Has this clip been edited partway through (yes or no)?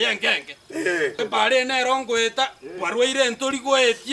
yes